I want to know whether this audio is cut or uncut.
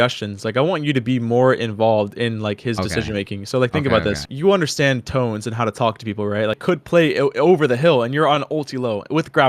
cut